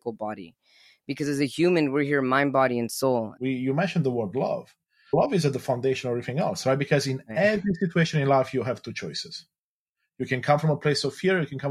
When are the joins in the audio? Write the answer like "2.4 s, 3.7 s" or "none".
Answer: 3.3 s, 5.1 s